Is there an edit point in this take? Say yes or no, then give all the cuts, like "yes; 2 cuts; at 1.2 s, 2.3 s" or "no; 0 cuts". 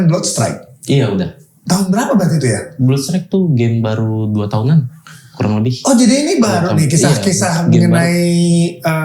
yes; 1 cut; at 1.5 s